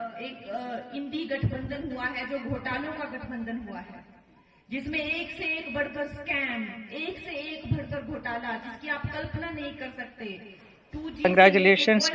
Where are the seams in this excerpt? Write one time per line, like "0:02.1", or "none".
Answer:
0:11.2